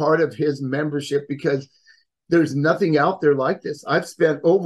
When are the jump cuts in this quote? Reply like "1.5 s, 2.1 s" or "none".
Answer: none